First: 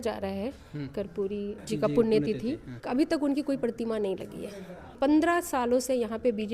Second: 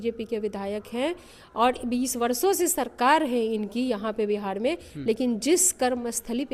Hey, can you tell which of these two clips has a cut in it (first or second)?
first